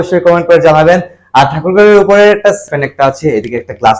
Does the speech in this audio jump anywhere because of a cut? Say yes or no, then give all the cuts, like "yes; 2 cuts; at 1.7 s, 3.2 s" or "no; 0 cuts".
yes; 1 cut; at 2.7 s